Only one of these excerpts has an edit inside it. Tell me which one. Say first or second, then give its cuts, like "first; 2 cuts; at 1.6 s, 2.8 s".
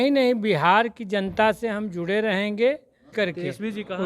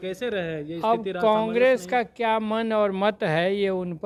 first; 1 cut; at 3.1 s